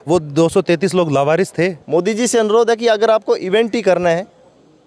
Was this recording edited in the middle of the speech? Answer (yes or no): yes